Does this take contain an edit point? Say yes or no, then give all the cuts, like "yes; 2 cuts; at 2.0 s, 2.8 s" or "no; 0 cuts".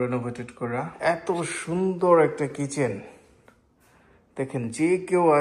yes; 1 cut; at 0.9 s